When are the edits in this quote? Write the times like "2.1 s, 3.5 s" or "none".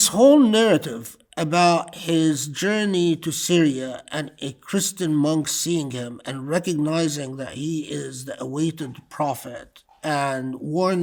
none